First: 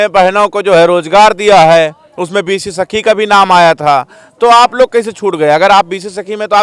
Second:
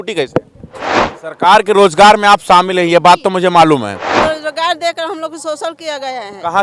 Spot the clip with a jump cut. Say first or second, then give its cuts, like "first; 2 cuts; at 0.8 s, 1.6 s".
second; 2 cuts; at 1.1 s, 4.3 s